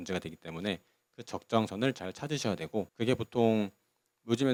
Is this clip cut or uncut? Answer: uncut